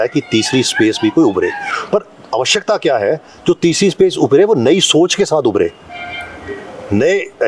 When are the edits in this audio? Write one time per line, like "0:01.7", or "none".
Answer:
none